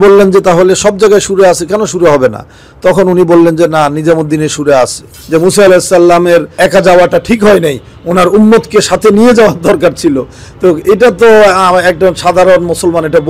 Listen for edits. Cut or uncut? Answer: cut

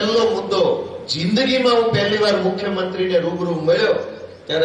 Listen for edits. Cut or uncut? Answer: uncut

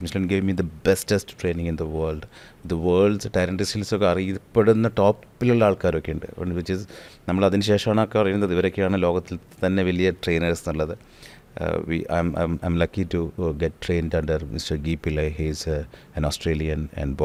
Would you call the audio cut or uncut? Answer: uncut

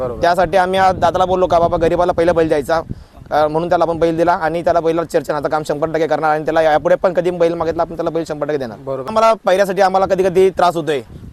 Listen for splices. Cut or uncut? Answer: cut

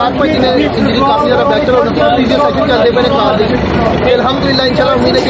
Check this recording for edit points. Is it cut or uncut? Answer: uncut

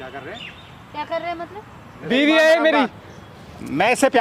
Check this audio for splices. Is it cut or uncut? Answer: cut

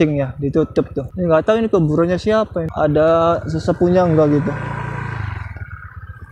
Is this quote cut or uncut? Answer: cut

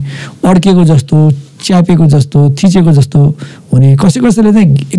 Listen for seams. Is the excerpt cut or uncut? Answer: uncut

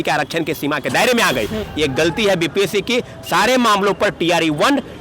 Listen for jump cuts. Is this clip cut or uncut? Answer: cut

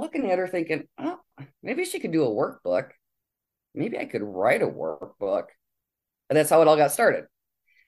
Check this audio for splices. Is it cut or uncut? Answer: uncut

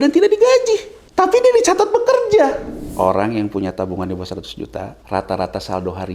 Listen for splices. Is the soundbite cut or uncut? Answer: cut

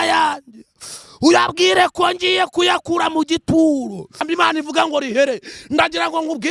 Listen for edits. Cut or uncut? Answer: cut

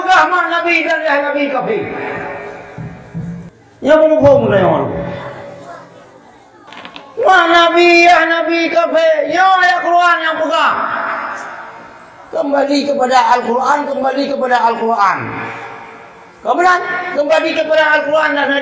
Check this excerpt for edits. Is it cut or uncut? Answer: cut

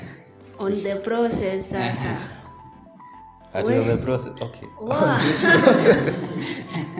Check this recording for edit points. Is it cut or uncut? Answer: uncut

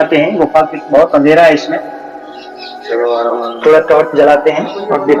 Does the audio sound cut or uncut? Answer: uncut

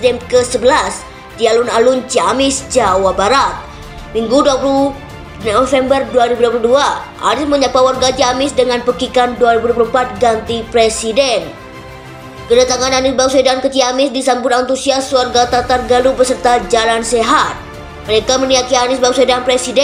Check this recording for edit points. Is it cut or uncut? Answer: uncut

